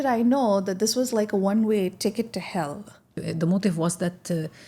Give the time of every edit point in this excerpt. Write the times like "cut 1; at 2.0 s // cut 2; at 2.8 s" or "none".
none